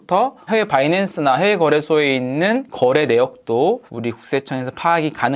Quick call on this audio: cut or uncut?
cut